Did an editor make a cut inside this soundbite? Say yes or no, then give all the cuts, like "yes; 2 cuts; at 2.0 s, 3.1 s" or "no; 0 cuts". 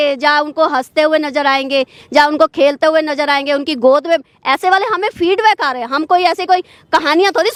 no; 0 cuts